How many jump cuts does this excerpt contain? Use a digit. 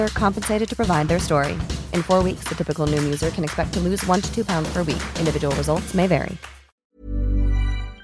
1